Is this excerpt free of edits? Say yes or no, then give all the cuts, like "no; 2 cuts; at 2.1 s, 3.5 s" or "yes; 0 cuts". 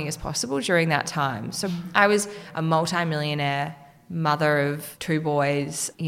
no; 3 cuts; at 1.7 s, 2.4 s, 4.9 s